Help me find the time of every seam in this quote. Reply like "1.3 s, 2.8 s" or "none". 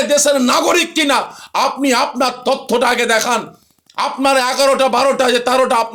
none